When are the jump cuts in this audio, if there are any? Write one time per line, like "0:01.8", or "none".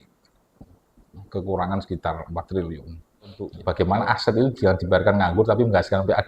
0:03.5